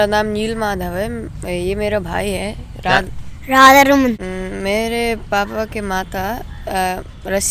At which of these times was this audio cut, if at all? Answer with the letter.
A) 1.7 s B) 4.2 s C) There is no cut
B